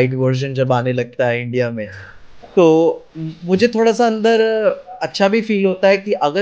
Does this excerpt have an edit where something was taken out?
no; 0 cuts

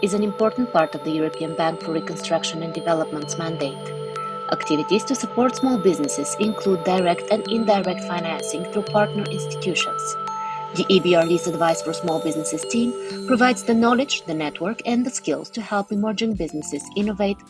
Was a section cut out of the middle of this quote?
no; 0 cuts

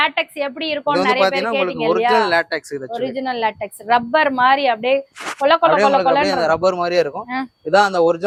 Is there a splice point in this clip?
no; 0 cuts

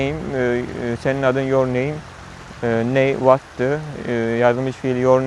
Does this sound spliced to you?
no; 0 cuts

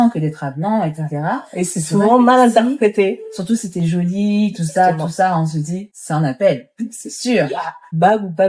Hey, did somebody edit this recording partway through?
no; 0 cuts

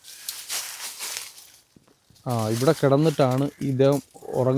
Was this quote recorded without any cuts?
yes; 0 cuts

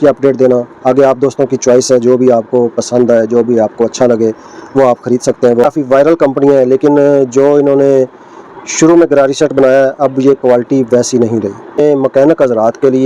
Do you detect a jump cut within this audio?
yes; 2 cuts; at 5.6 s, 11.8 s

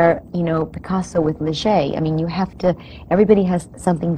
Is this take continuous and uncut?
yes; 0 cuts

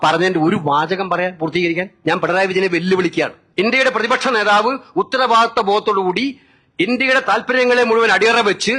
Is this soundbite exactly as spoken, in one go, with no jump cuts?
no; 2 cuts; at 1.9 s, 3.4 s

